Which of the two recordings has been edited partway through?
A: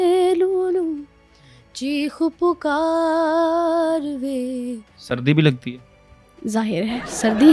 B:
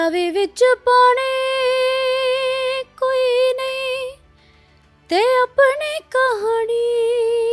A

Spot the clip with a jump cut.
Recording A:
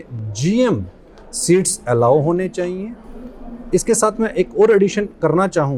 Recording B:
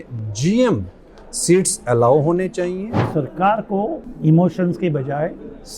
B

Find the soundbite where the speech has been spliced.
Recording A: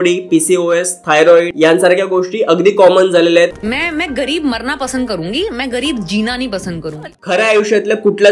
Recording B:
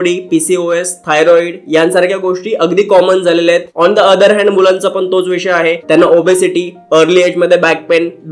A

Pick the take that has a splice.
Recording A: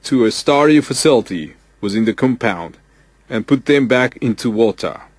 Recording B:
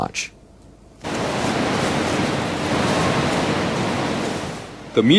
A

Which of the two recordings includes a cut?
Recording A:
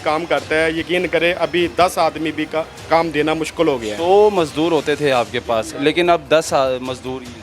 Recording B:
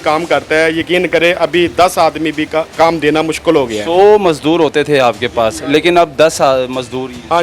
B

